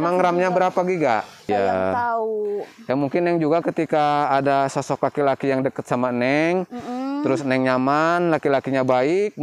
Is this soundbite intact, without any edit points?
no; 1 cut; at 1.5 s

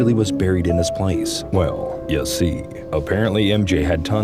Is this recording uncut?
yes; 0 cuts

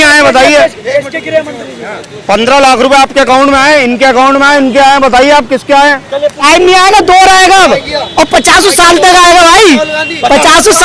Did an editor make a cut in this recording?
yes; 1 cut; at 6.4 s

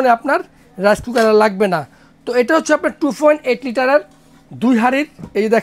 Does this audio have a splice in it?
no; 0 cuts

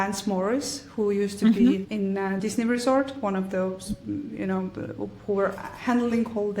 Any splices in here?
yes; 1 cut; at 2.4 s

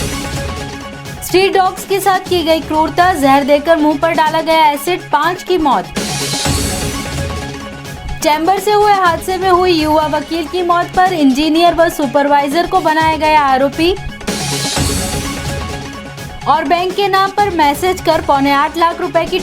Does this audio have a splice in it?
yes; 1 cut; at 1.2 s

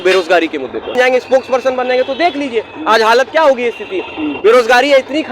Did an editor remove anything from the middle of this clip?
yes; 1 cut; at 0.9 s

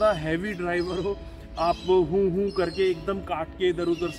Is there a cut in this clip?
no; 0 cuts

